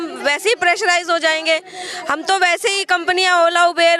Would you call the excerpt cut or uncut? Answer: uncut